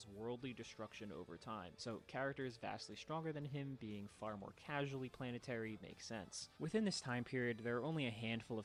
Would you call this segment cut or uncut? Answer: uncut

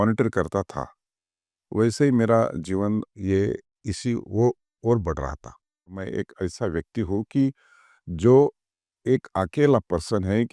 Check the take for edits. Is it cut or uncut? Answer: cut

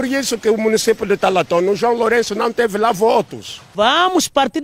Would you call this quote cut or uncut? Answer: cut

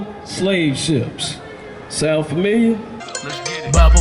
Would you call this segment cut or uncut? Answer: cut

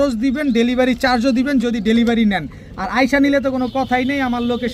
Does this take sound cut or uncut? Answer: uncut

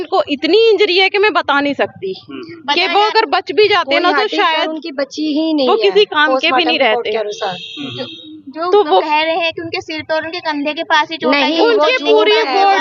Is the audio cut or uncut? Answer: uncut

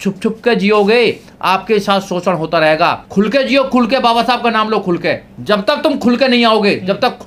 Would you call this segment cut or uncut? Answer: cut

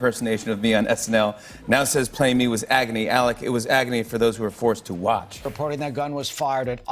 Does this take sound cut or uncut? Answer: cut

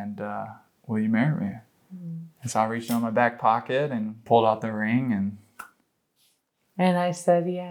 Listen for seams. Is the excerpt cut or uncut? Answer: cut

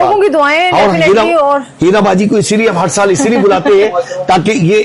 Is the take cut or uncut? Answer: uncut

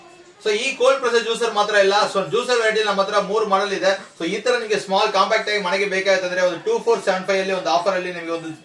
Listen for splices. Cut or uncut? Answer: uncut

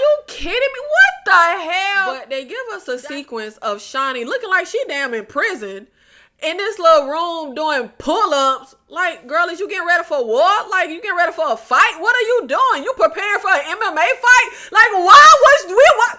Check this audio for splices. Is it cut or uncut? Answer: cut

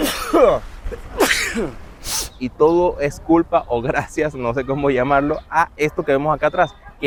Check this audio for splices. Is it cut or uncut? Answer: uncut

